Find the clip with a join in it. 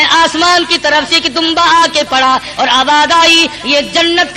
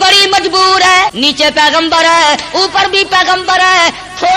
second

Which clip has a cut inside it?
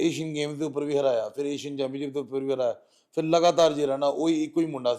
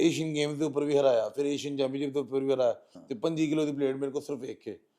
second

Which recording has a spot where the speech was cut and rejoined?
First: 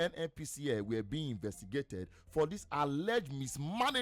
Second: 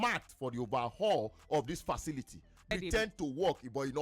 second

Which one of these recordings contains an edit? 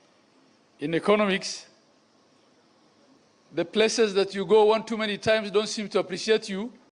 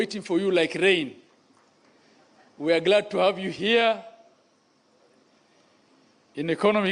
first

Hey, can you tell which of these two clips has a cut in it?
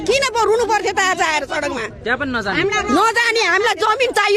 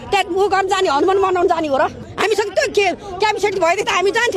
second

